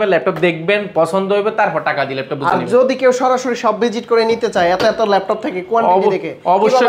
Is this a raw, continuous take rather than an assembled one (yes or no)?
yes